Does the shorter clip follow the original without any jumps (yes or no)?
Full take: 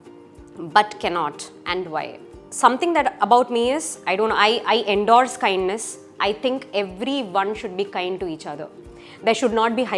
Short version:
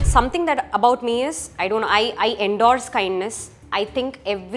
yes